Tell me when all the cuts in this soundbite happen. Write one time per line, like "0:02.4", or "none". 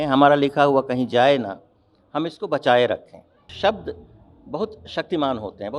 0:03.4